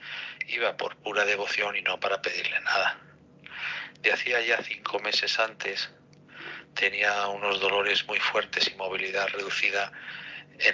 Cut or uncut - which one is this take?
uncut